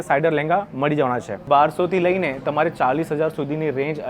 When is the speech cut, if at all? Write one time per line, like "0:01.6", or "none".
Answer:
0:01.4